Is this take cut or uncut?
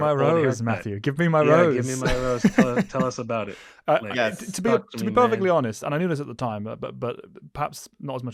uncut